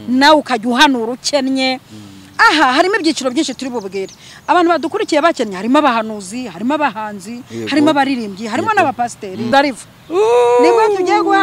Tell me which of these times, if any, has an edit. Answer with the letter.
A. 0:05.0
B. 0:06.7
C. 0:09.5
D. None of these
C